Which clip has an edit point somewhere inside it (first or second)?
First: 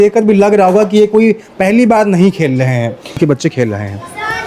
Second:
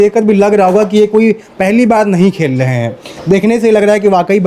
first